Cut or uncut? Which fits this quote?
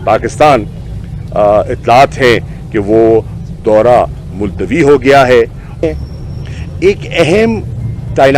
cut